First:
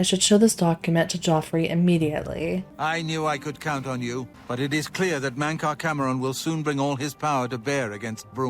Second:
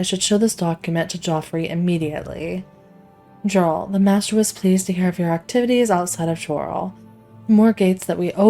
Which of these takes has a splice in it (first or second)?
first